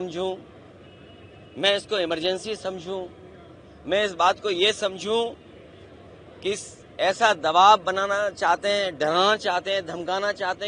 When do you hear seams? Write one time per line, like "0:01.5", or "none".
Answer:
none